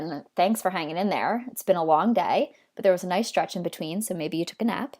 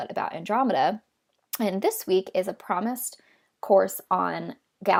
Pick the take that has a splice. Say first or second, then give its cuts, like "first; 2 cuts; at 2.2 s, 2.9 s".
first; 1 cut; at 4.0 s